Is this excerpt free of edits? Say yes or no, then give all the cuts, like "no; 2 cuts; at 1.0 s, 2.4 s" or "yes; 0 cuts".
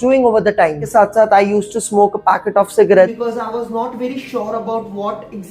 no; 2 cuts; at 0.8 s, 3.1 s